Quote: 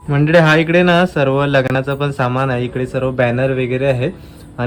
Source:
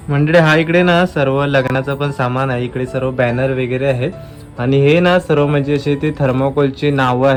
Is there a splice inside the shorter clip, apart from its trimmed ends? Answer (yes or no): no